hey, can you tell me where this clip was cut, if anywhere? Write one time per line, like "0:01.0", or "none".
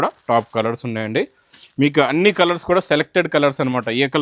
none

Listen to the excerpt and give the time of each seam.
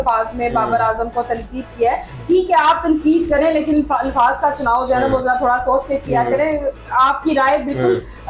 none

